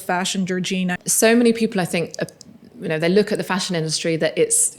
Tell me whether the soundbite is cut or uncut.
cut